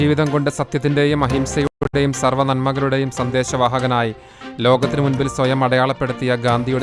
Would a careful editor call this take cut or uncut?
uncut